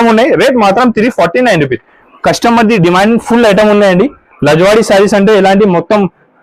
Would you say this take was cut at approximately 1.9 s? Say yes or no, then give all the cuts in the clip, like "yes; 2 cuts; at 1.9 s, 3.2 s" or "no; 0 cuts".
yes; 1 cut; at 1.9 s